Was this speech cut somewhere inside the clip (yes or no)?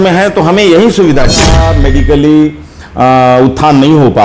yes